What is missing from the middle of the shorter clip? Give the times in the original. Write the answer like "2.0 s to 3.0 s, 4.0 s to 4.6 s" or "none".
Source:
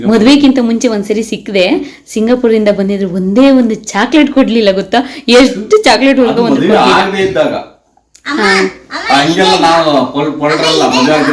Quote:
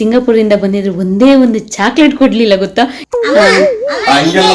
5.1 s to 8.0 s